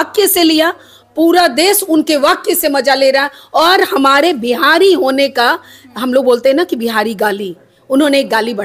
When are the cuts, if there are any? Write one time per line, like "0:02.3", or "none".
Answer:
none

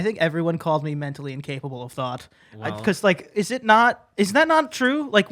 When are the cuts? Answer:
none

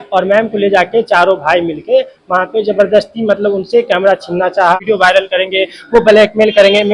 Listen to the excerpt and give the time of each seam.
0:04.8

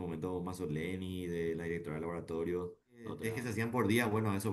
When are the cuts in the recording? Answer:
0:03.3

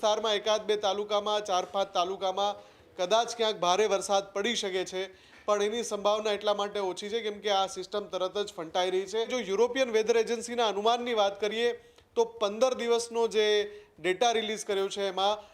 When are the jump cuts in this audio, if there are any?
0:09.3

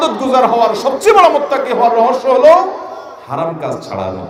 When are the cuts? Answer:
none

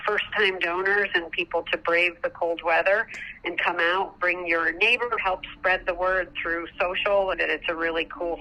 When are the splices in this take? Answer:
0:05.2
0:07.4

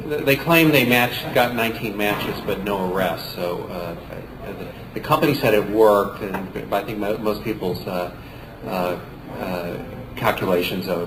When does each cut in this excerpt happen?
none

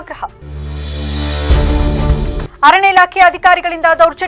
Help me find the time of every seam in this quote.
none

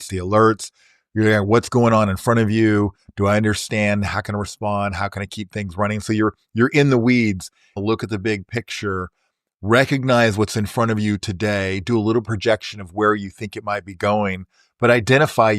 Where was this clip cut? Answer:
0:07.8

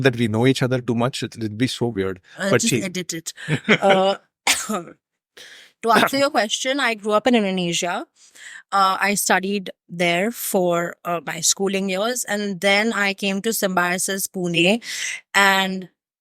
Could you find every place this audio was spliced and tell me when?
none

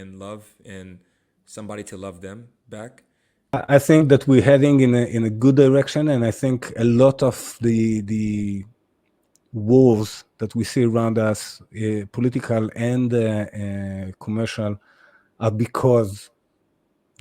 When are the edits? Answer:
0:03.5

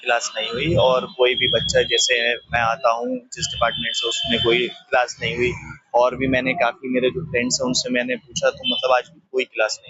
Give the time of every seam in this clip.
none

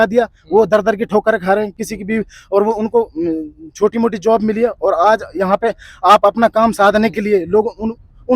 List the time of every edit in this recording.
none

